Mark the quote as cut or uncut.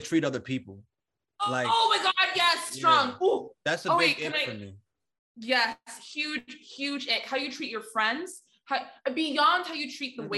uncut